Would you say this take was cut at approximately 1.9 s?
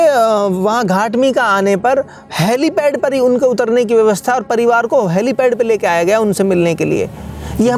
no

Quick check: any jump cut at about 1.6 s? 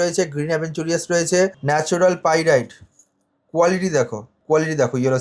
yes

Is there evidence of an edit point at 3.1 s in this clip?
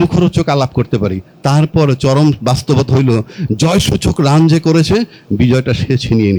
no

